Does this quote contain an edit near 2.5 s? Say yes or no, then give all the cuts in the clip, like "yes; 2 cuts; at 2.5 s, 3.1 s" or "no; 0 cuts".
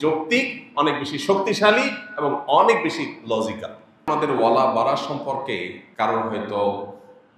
no; 2 cuts; at 4.0 s, 5.8 s